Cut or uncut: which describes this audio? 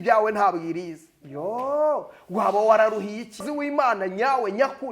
cut